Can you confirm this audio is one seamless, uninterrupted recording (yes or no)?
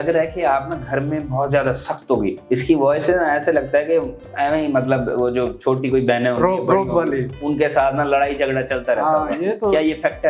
yes